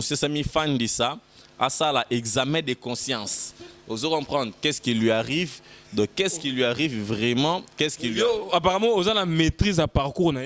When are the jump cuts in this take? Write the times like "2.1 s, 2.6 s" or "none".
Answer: none

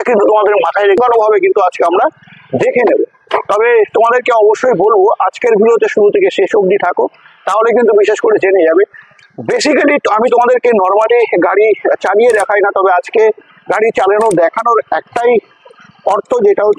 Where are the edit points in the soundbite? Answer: 1.0 s

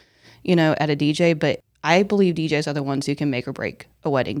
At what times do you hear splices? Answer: 1.7 s

